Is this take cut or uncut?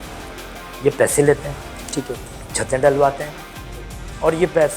uncut